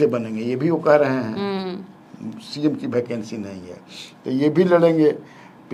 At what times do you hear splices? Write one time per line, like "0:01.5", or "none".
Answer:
none